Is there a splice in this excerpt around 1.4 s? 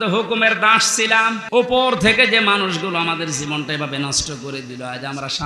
yes; 1 cut; at 1.4 s

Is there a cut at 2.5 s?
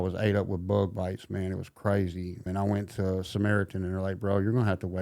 yes; 1 cut; at 2.5 s

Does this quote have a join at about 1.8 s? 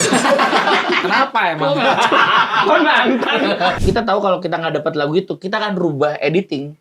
no; 1 cut; at 3.8 s

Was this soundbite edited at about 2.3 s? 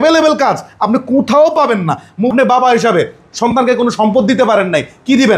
yes; 1 cut; at 2.3 s

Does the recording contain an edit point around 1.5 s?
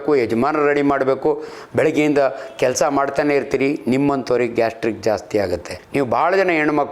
no; 1 cut; at 5.8 s

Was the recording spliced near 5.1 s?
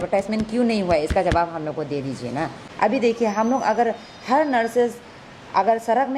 no; 1 cut; at 2.6 s

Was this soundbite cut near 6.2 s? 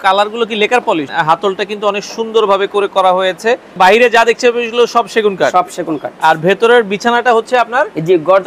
no; 2 cuts; at 1.1 s, 3.8 s

